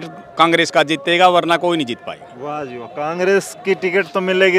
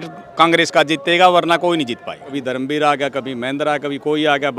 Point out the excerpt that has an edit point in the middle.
second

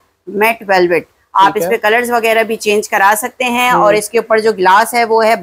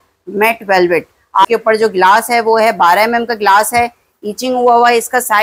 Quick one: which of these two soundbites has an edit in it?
second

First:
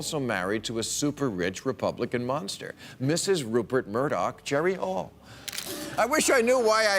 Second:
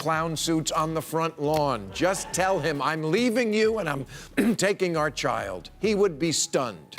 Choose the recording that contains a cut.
first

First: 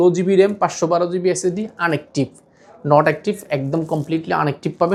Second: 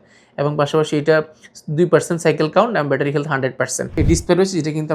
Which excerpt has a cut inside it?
second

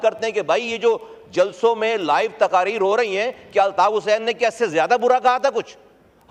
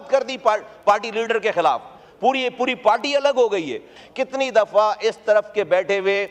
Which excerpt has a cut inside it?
second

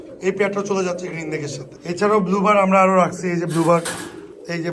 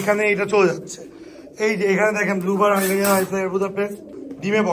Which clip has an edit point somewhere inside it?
first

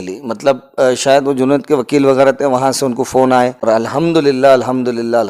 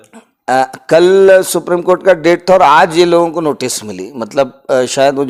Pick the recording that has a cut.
first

